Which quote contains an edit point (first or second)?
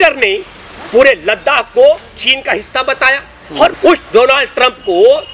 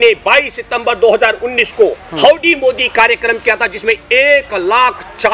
first